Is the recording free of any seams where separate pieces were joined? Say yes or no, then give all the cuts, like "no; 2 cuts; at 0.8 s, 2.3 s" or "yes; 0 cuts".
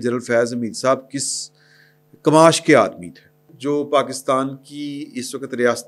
no; 1 cut; at 3.5 s